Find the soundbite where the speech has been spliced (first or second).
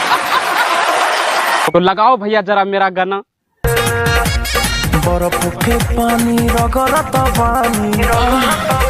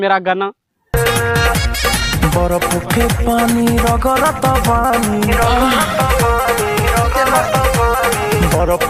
first